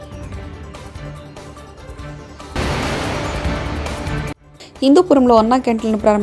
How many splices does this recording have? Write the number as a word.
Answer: zero